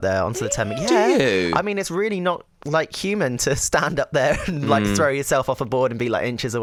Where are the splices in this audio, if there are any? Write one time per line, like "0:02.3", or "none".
none